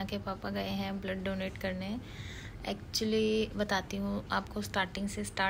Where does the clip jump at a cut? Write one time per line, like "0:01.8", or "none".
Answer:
none